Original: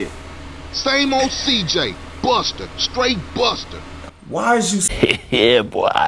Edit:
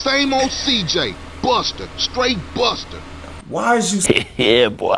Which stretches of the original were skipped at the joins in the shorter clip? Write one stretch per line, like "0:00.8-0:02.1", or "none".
0:04.8-0:05.0